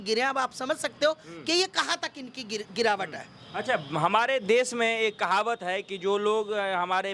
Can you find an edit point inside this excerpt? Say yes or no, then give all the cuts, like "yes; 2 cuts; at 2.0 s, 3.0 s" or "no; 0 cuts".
no; 0 cuts